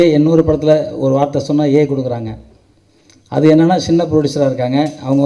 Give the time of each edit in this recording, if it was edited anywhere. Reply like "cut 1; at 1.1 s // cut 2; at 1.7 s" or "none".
none